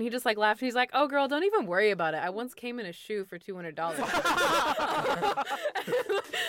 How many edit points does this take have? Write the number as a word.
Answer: one